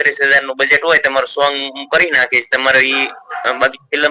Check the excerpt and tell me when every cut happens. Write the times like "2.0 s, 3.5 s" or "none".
none